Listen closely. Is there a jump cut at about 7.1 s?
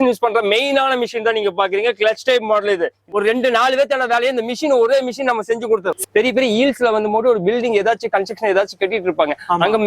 no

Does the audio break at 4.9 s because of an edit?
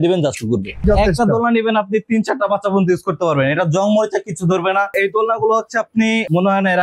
yes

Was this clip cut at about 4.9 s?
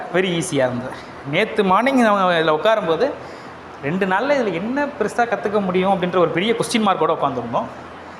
no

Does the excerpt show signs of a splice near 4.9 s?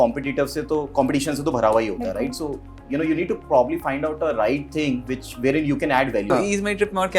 no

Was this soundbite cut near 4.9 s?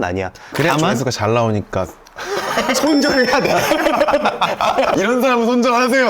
yes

